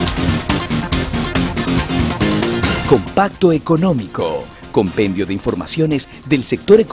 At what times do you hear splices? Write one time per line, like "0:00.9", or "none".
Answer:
0:01.1